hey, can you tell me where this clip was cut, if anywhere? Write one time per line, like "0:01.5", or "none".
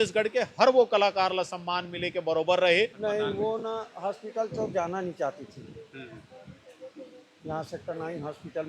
0:03.0